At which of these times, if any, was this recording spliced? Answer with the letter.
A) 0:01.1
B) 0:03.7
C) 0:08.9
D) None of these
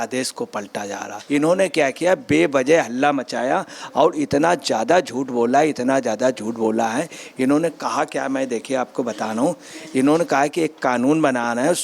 A